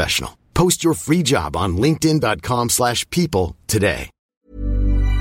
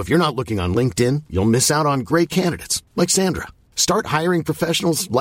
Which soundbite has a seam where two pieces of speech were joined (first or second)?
first